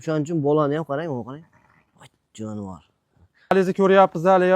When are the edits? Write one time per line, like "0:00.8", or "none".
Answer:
0:03.5